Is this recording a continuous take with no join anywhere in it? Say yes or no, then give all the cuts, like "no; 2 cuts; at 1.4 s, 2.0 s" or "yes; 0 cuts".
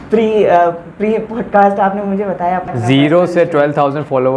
yes; 0 cuts